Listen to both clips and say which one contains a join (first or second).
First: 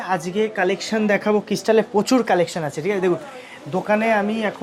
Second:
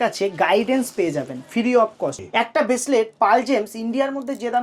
second